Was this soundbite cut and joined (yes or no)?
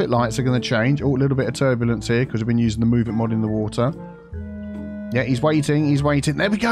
no